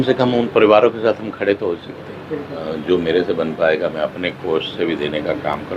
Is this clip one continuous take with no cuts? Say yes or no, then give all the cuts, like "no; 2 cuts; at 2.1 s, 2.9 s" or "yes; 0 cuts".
no; 1 cut; at 2.6 s